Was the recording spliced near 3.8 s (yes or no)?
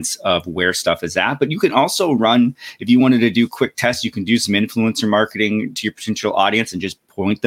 no